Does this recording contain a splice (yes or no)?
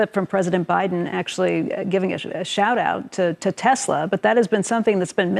no